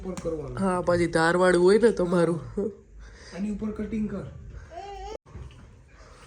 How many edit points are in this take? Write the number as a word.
one